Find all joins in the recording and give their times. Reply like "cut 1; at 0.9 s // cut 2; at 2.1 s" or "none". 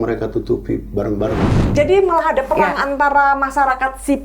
cut 1; at 1.7 s